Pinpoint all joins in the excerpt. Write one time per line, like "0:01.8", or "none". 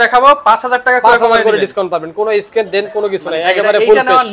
none